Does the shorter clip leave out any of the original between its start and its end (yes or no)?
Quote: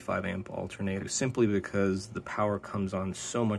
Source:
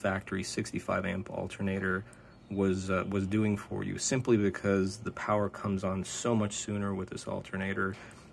yes